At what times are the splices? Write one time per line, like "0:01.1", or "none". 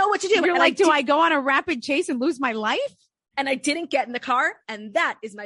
none